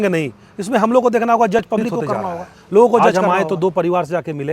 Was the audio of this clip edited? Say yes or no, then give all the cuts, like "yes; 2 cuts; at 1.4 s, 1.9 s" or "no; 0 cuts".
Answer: yes; 1 cut; at 3.0 s